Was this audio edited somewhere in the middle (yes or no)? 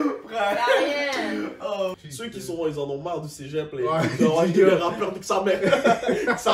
yes